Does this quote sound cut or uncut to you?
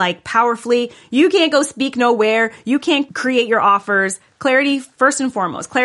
cut